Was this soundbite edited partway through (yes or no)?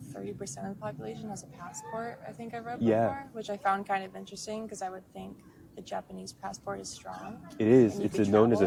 no